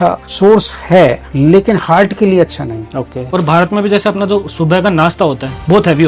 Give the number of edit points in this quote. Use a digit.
1